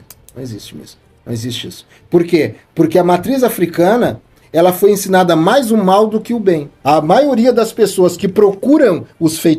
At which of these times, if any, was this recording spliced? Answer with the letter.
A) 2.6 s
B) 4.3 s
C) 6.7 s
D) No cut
C